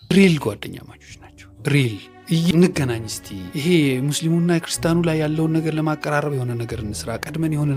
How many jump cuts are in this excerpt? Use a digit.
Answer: 1